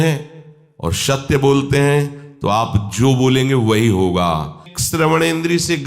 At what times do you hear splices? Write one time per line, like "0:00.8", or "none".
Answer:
0:04.7